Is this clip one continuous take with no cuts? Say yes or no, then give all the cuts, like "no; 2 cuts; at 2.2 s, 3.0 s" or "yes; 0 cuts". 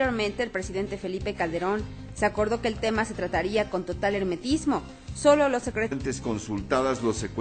yes; 0 cuts